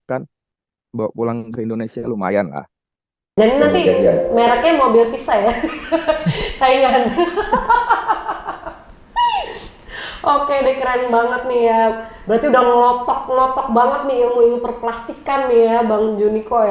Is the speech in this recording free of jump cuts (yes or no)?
yes